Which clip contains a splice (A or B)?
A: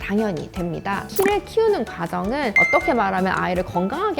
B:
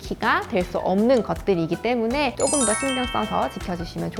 A